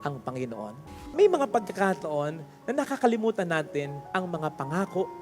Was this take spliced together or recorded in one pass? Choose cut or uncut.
cut